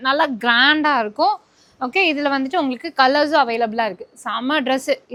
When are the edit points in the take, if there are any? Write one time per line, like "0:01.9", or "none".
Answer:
none